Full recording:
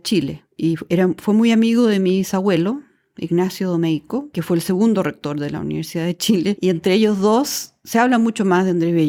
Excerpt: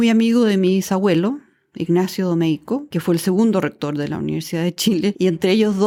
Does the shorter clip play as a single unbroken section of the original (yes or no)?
yes